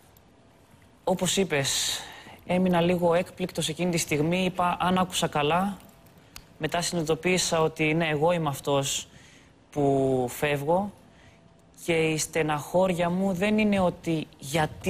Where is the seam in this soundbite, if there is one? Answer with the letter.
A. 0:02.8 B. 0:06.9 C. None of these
B